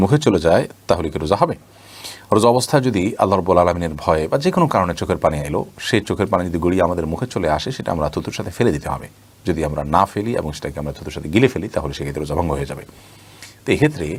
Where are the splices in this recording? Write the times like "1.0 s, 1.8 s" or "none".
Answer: none